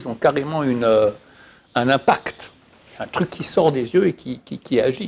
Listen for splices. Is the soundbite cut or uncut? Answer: uncut